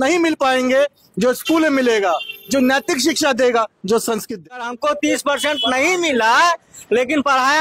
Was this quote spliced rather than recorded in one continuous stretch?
yes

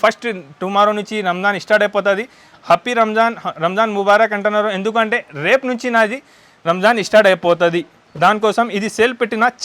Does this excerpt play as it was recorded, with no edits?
yes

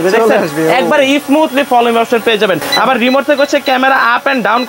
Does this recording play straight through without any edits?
yes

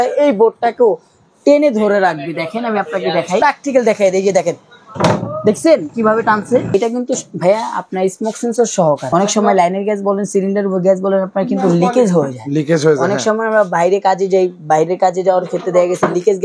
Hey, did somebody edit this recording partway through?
yes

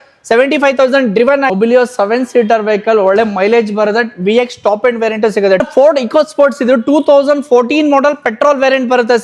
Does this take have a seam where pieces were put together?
yes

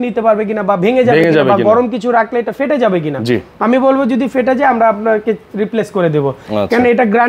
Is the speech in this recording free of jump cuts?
yes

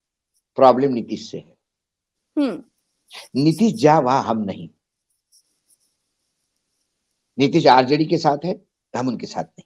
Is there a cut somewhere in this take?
no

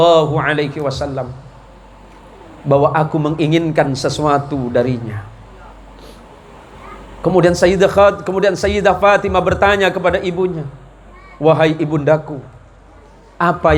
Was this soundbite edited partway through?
no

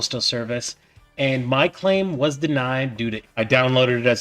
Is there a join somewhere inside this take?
yes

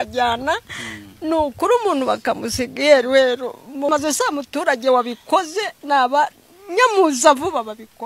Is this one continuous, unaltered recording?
no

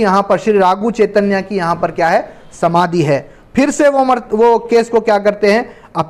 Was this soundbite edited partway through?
no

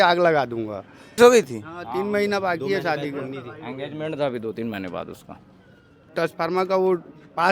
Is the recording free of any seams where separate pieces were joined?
no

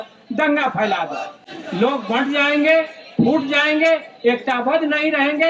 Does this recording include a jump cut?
no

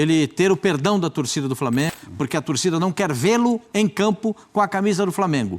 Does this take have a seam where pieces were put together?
yes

